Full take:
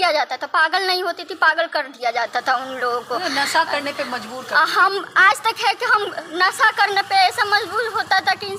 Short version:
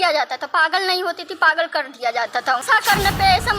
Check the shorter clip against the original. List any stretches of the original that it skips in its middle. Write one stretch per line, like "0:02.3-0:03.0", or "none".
0:02.6-0:06.5